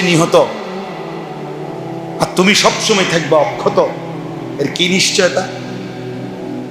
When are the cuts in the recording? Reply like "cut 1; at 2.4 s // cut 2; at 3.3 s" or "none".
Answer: none